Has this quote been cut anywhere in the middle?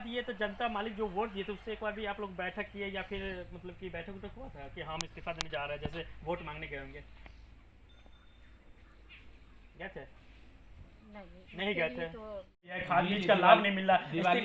yes; 1 cut; at 12.8 s

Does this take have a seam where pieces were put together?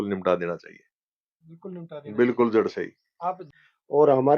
yes; 1 cut; at 3.5 s

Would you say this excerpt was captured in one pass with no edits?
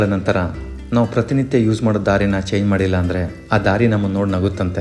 yes; 0 cuts

